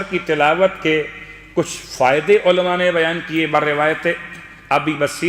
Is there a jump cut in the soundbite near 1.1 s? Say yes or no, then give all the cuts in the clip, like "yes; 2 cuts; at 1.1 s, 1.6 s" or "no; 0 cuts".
no; 0 cuts